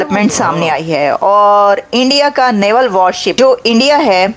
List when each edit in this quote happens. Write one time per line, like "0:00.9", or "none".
0:03.3